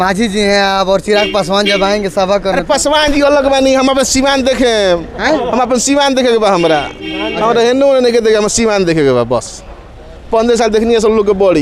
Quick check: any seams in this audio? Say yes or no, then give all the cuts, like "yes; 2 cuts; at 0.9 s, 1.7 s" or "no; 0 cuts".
no; 0 cuts